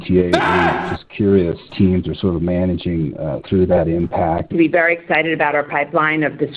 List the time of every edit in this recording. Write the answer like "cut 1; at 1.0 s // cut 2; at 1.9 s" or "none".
cut 1; at 4.5 s